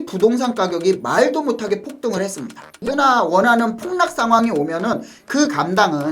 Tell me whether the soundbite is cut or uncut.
cut